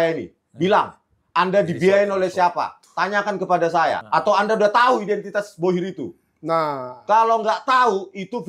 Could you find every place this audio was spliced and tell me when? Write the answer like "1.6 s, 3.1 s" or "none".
none